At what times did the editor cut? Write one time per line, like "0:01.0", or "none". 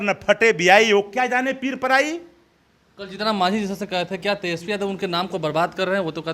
none